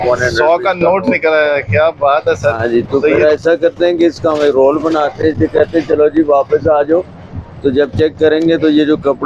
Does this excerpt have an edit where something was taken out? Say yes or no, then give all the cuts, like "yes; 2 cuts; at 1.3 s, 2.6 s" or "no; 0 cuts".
no; 0 cuts